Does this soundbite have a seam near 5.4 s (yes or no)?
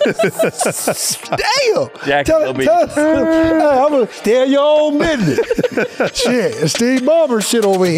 no